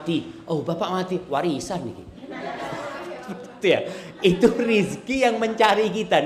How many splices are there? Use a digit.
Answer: 0